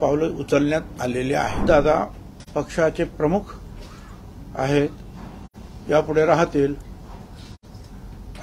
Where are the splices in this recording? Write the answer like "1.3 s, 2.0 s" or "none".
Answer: 1.6 s